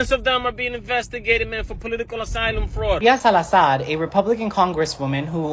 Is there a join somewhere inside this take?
yes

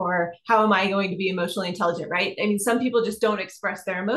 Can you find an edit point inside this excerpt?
no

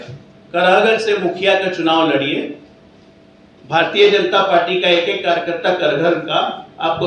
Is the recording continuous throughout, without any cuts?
yes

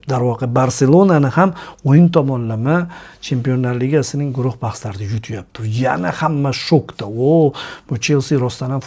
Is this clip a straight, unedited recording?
yes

